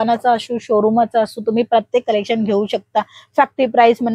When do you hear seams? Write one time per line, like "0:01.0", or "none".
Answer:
none